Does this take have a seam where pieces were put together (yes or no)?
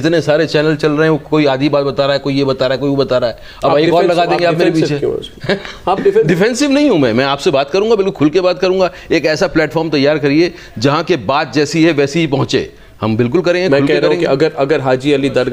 no